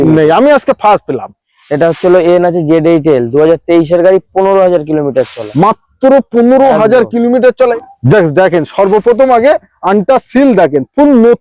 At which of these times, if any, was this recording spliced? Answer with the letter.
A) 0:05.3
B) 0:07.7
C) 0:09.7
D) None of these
B